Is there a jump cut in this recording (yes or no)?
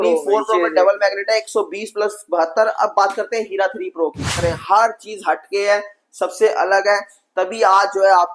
yes